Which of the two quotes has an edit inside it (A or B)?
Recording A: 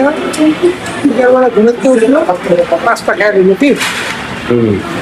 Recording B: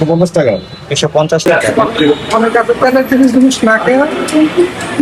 B